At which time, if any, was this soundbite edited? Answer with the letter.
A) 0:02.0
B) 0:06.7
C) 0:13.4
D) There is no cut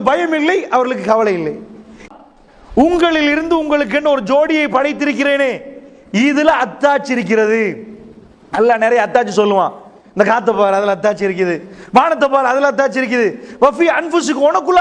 A